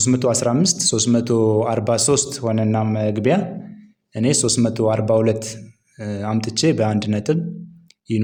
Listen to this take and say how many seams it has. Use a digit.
0